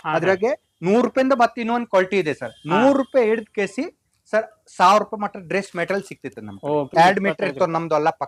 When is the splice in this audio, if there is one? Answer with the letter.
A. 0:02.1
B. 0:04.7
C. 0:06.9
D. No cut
C